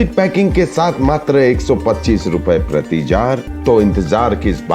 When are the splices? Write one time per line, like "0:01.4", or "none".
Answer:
0:03.5